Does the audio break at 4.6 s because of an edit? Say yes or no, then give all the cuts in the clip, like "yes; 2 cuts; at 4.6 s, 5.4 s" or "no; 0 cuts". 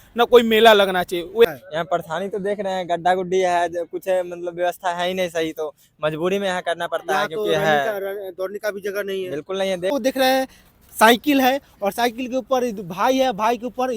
no; 2 cuts; at 1.4 s, 9.9 s